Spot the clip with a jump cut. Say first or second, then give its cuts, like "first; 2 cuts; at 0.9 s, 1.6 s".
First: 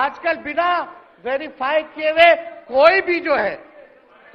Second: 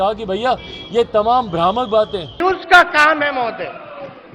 second; 1 cut; at 2.3 s